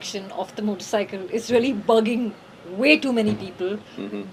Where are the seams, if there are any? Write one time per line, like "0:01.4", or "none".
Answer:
none